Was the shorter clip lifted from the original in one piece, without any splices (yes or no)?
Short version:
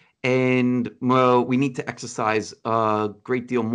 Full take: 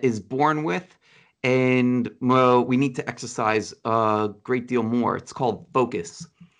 yes